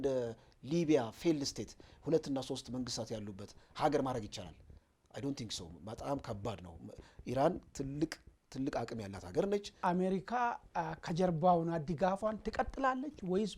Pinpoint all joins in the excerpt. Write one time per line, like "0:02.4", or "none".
0:09.7